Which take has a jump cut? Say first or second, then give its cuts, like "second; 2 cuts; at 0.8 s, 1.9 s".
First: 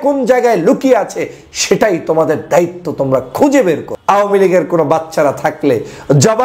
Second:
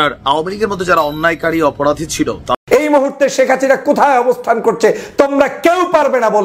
second; 1 cut; at 2.6 s